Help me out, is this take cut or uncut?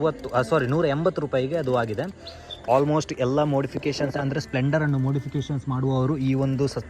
cut